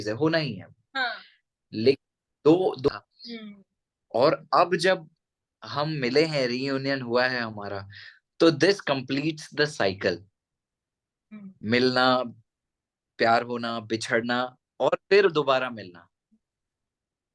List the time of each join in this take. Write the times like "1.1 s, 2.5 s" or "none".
2.9 s